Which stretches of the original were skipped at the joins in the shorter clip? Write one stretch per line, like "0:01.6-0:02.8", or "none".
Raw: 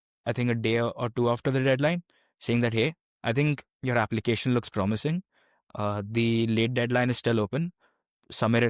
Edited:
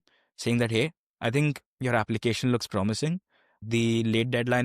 0:05.6-0:06.0